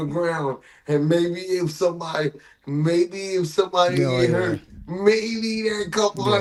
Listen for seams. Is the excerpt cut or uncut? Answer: uncut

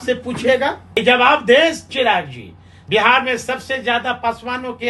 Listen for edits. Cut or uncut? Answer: cut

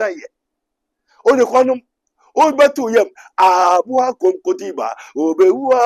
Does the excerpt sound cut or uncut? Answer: uncut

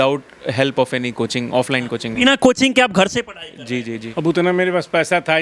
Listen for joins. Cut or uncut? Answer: cut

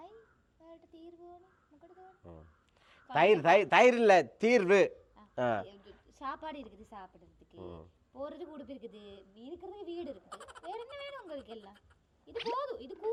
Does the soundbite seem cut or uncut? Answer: uncut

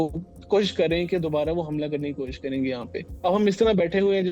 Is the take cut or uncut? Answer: cut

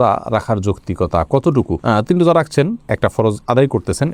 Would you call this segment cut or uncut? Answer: uncut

